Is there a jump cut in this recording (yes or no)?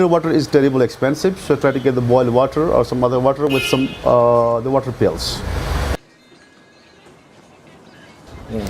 yes